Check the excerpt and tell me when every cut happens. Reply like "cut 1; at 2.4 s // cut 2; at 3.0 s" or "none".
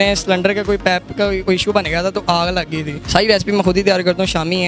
cut 1; at 2.9 s